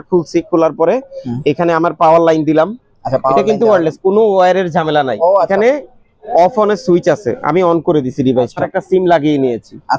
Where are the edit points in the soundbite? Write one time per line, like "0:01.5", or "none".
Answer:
0:05.5
0:08.7